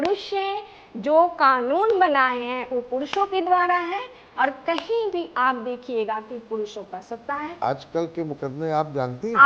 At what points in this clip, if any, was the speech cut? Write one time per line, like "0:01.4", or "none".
0:07.6